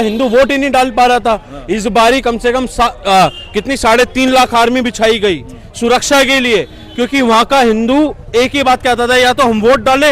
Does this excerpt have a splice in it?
no; 0 cuts

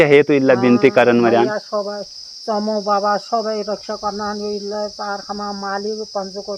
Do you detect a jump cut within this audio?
no; 0 cuts

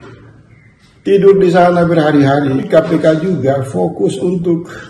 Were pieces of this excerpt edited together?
yes; 1 cut; at 2.6 s

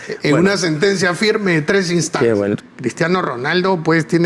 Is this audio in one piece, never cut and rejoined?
no; 1 cut; at 2.6 s

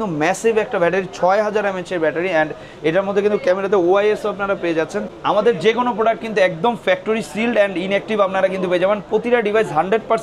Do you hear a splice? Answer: yes; 1 cut; at 5.1 s

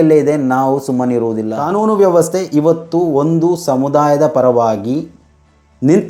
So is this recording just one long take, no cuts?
no; 1 cut; at 1.2 s

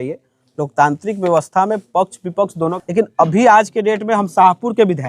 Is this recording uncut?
no; 1 cut; at 2.7 s

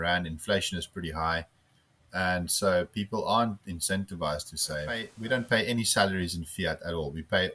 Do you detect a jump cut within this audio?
yes; 1 cut; at 5.1 s

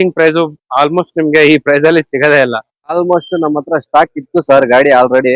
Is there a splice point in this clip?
yes; 1 cut; at 3.0 s

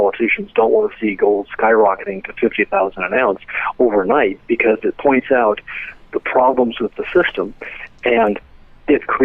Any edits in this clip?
no; 0 cuts

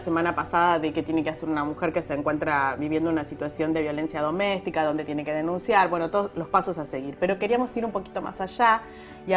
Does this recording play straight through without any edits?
yes; 0 cuts

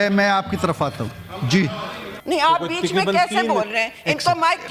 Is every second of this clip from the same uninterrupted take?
no; 1 cut; at 2.1 s

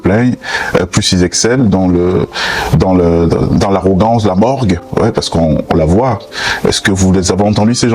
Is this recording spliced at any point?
no; 0 cuts

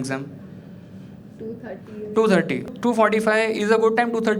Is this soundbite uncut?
no; 1 cut; at 2.7 s

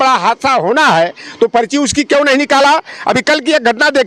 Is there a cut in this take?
no; 0 cuts

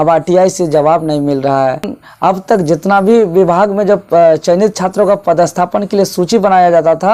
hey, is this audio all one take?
yes; 0 cuts

